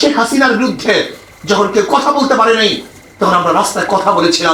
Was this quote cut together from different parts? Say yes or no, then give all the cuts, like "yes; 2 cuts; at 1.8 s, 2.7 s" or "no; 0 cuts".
no; 0 cuts